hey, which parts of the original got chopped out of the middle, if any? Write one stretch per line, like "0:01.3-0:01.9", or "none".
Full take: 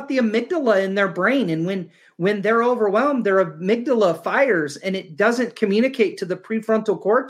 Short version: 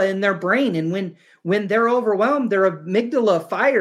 none